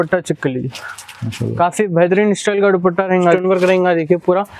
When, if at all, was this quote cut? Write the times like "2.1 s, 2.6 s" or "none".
3.2 s